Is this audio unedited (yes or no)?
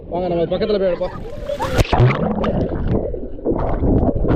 yes